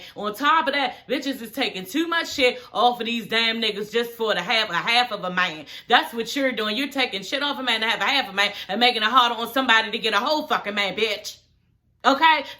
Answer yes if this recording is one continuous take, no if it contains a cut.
yes